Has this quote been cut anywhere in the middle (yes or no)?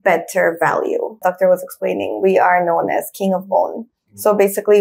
yes